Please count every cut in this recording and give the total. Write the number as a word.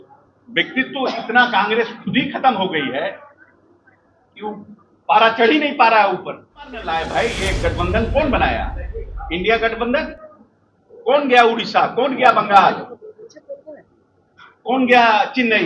one